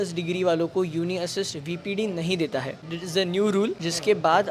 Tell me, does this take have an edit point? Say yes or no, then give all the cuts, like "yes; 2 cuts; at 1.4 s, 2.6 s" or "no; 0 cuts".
no; 0 cuts